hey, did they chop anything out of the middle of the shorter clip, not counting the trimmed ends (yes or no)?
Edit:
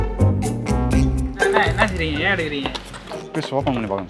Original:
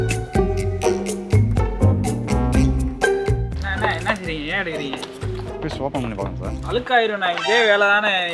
yes